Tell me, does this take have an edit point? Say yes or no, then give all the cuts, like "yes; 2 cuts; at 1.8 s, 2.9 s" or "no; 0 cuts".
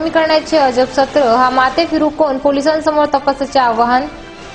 no; 0 cuts